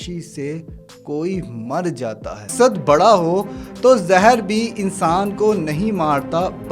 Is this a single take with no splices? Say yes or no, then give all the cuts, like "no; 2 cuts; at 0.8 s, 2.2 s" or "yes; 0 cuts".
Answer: no; 1 cut; at 2.5 s